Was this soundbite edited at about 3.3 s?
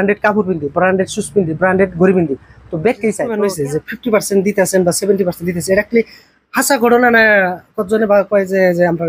yes; 1 cut; at 3.3 s

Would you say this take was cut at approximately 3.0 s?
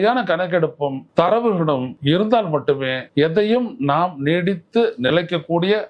yes; 3 cuts; at 1.0 s, 1.9 s, 3.0 s

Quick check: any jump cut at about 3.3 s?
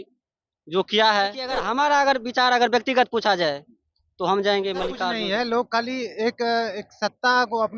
no; 2 cuts; at 1.6 s, 5.0 s

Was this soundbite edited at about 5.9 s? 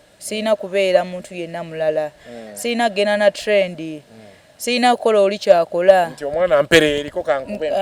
no; 0 cuts

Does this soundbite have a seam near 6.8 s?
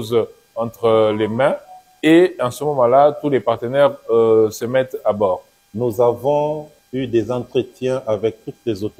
yes; 2 cuts; at 5.6 s, 6.8 s

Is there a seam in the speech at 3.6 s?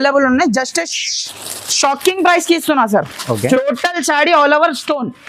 yes; 1 cut; at 3.6 s

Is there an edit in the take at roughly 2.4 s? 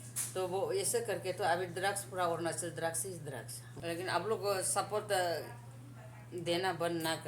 no; 1 cut; at 3.7 s

